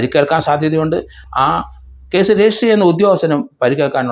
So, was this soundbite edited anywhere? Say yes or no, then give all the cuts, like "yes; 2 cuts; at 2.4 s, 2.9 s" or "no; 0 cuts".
no; 0 cuts